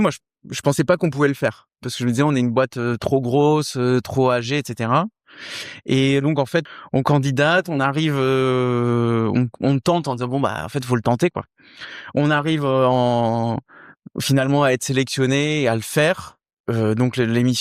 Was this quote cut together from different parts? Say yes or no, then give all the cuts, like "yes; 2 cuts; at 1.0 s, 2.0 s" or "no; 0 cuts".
yes; 2 cuts; at 6.7 s, 16.5 s